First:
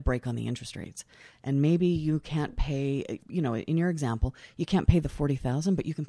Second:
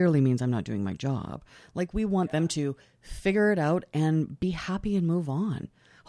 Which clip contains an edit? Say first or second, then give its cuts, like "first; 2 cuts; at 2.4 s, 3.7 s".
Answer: first; 1 cut; at 3.2 s